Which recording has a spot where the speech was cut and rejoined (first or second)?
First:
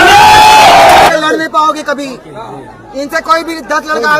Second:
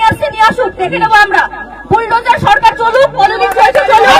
first